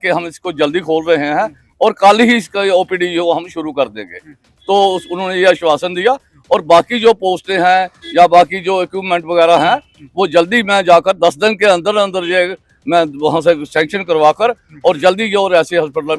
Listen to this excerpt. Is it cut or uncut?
uncut